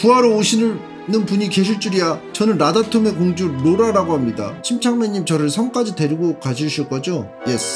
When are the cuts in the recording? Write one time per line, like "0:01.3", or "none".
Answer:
0:02.2
0:04.5